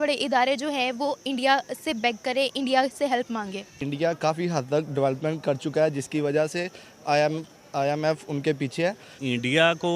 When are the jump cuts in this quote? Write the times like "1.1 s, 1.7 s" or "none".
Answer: 3.8 s, 9.2 s

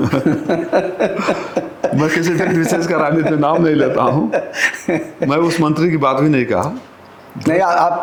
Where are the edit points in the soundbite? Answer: none

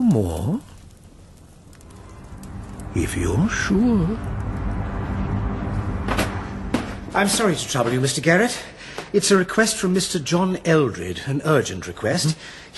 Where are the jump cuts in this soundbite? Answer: none

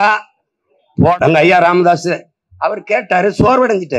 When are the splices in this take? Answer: 1.2 s

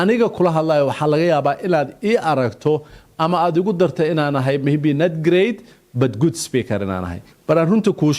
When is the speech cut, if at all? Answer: 7.3 s

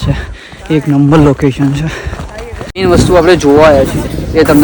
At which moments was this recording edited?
2.8 s

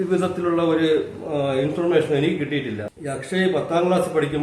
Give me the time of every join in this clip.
2.8 s

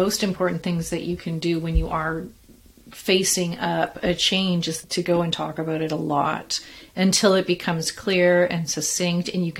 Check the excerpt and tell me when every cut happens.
4.8 s

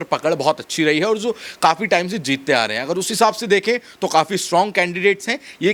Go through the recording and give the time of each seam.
none

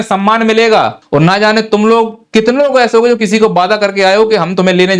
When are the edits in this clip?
1.0 s

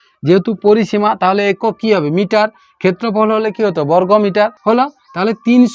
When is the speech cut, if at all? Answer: 4.6 s

